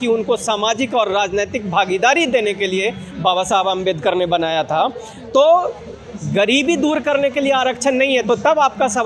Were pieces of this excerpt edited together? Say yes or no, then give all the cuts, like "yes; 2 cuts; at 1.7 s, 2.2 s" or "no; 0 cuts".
no; 0 cuts